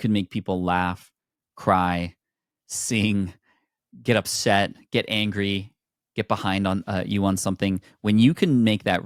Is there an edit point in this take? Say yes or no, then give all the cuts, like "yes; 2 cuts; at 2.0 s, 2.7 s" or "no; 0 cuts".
no; 0 cuts